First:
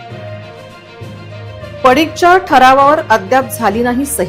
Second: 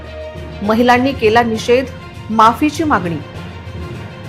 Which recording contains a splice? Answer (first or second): first